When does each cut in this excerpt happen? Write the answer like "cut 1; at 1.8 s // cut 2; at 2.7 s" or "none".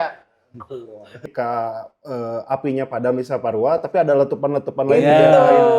cut 1; at 1.3 s

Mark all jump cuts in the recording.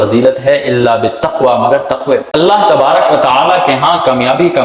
cut 1; at 2.3 s

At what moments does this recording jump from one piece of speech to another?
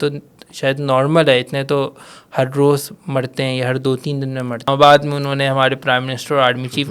cut 1; at 4.7 s

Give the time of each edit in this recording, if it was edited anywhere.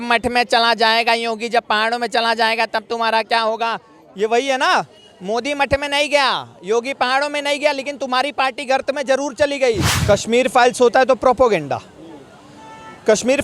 cut 1; at 9.9 s

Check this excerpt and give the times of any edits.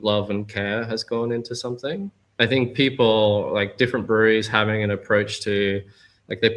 cut 1; at 2.2 s

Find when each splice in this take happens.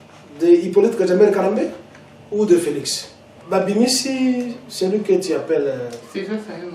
cut 1; at 3.4 s

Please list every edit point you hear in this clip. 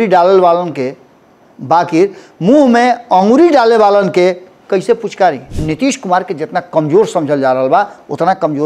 cut 1; at 5.5 s

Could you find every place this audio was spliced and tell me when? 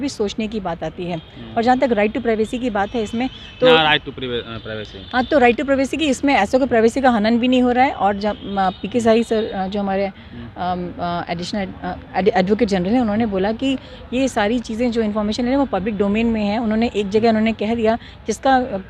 none

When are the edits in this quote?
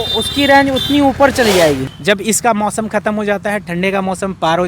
cut 1; at 1.9 s

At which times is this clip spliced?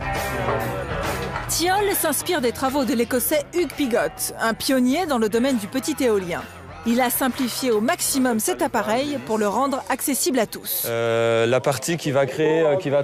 cut 1; at 2.1 s

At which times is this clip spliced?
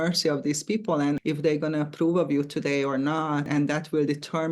cut 1; at 1.2 s // cut 2; at 3.5 s

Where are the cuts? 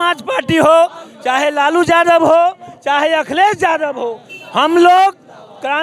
none

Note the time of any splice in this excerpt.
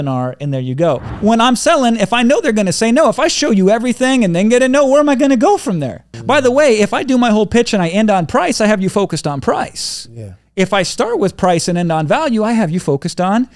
cut 1; at 1.1 s // cut 2; at 6.2 s

